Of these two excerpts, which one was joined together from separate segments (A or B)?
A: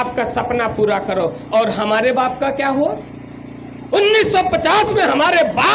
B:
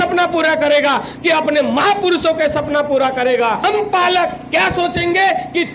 B